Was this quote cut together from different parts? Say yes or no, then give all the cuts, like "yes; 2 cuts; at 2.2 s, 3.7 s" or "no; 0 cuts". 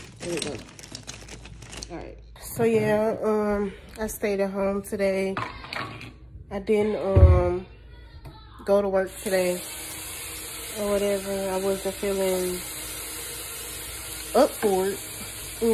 yes; 1 cut; at 2.3 s